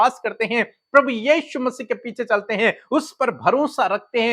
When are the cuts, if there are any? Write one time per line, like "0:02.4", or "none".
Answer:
none